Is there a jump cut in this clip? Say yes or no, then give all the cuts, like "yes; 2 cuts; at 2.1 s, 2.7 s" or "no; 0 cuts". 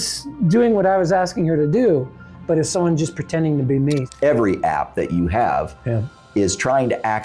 yes; 1 cut; at 4.1 s